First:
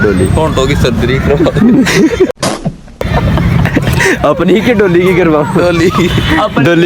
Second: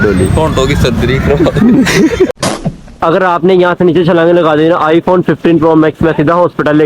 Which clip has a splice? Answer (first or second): second